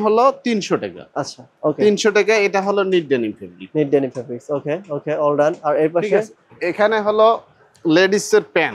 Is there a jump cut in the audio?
no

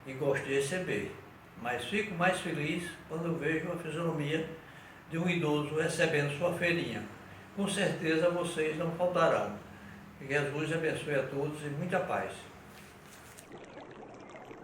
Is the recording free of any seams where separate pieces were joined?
no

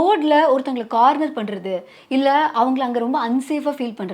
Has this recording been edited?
no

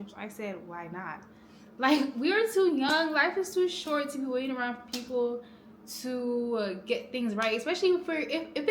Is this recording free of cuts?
yes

